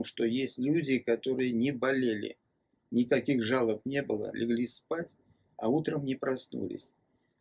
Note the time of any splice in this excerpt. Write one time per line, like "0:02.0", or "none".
none